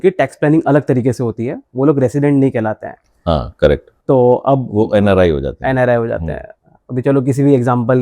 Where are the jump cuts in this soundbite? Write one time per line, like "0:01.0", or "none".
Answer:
none